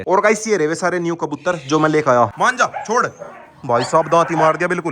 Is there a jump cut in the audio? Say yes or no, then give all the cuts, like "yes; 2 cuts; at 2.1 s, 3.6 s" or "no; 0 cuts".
yes; 1 cut; at 2.3 s